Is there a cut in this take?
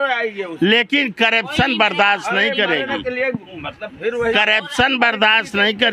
no; 0 cuts

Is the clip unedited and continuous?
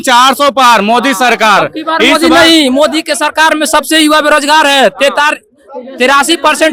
yes; 0 cuts

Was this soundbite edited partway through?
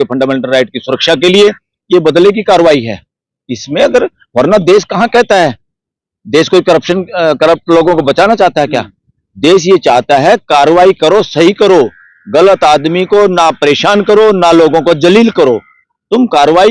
yes; 1 cut; at 1.7 s

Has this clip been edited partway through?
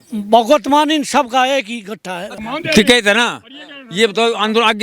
yes; 1 cut; at 2.3 s

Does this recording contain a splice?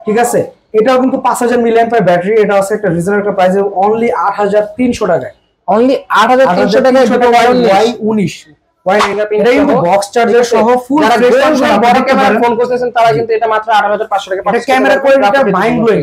yes; 1 cut; at 9.1 s

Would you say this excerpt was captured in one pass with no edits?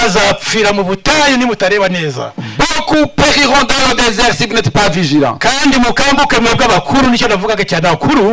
yes; 0 cuts

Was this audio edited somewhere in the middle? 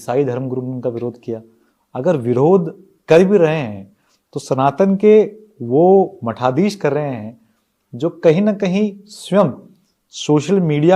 no; 0 cuts

